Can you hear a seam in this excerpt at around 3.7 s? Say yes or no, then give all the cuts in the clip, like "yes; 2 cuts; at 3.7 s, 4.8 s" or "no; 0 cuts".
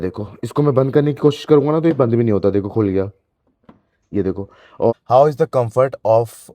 no; 1 cut; at 4.9 s